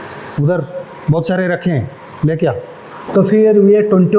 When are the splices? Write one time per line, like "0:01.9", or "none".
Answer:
0:03.0

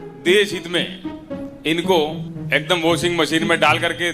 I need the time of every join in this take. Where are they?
0:02.3

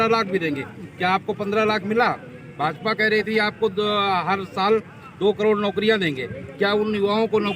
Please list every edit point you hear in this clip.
none

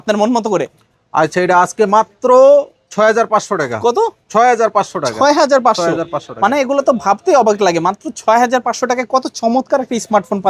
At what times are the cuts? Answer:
none

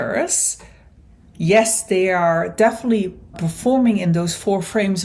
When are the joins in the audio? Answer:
0:03.4

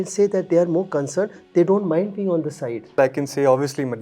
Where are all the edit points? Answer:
0:03.0

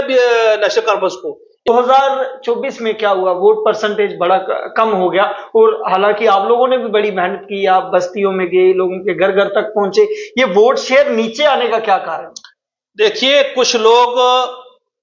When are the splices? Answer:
0:01.7

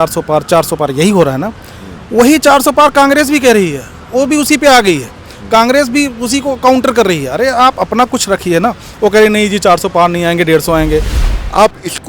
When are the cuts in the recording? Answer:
0:11.2

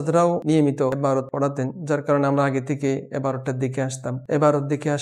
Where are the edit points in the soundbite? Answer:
0:01.1
0:04.1

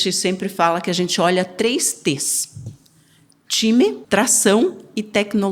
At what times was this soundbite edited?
0:04.0

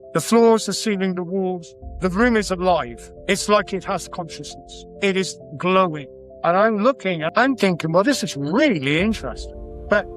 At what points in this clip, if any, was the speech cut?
0:07.2

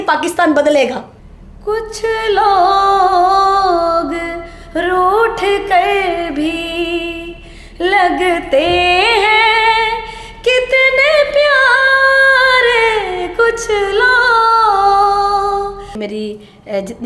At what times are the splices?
0:01.1
0:16.0

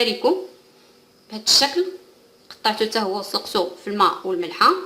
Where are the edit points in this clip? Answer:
0:02.3

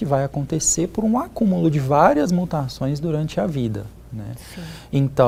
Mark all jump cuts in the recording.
none

